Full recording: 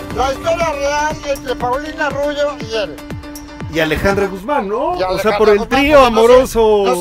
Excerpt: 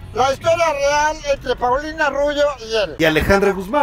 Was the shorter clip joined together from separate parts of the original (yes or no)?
yes